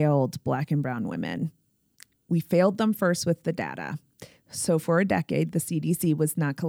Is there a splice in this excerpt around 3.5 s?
no; 0 cuts

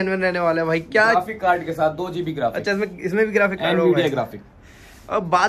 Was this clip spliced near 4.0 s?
no; 0 cuts

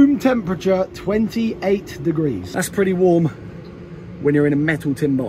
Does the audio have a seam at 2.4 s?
yes; 1 cut; at 2.4 s

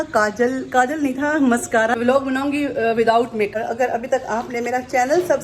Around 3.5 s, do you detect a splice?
yes; 2 cuts; at 1.9 s, 3.5 s

